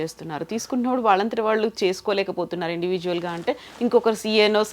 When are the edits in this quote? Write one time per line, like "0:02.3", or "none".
none